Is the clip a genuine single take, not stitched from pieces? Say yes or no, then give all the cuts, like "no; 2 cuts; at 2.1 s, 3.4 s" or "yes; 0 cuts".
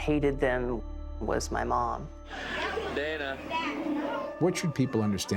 yes; 0 cuts